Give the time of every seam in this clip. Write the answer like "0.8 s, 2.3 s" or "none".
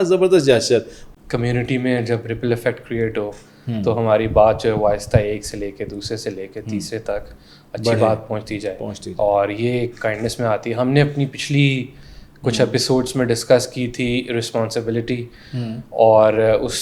1.0 s